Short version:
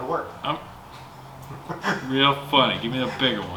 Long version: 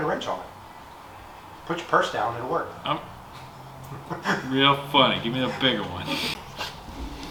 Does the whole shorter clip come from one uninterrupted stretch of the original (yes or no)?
yes